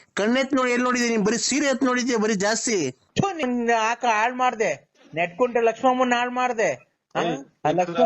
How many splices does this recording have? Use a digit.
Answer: 1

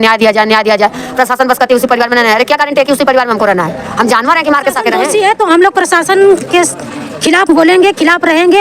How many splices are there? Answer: 1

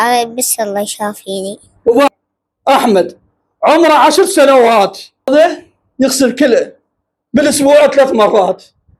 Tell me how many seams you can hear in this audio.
2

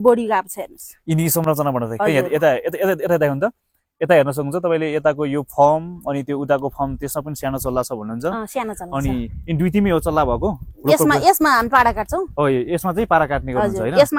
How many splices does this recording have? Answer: 0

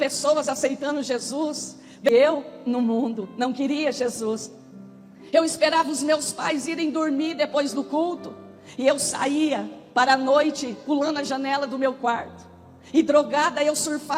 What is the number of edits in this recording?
1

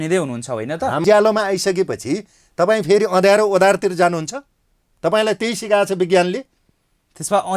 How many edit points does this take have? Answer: 1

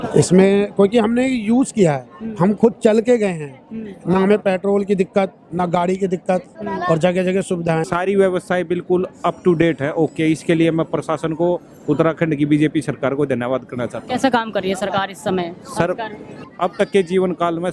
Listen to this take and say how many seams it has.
2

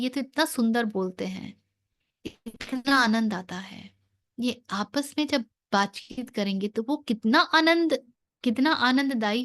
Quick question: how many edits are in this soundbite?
1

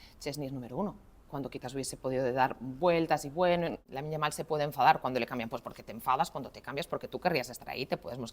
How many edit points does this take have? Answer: 1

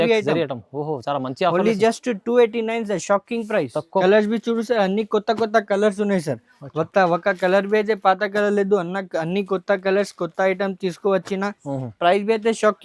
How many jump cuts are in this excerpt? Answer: 1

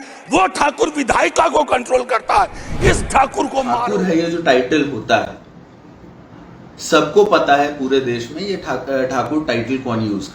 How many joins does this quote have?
1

